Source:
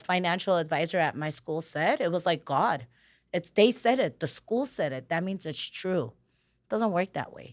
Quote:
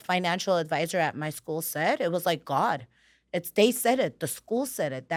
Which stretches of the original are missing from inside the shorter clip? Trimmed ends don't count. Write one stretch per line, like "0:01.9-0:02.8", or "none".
none

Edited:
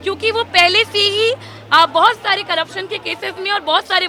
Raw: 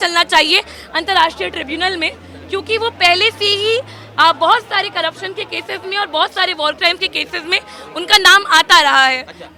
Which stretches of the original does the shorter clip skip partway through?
none

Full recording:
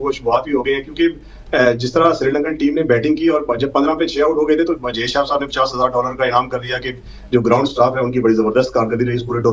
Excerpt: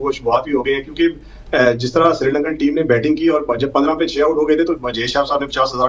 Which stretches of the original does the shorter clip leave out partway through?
none

